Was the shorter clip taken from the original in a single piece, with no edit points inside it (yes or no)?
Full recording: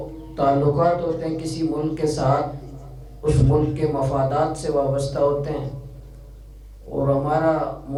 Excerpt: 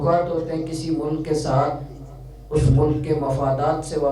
yes